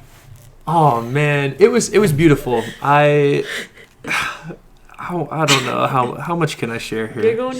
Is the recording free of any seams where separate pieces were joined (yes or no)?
no